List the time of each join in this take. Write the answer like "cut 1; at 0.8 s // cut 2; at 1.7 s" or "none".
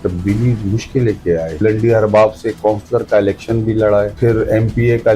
cut 1; at 1.6 s // cut 2; at 4.1 s